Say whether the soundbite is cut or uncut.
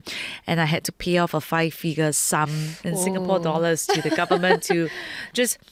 uncut